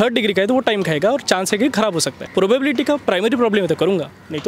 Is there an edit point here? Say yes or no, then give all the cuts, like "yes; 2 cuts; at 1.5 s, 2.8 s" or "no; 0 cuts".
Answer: yes; 1 cut; at 2.2 s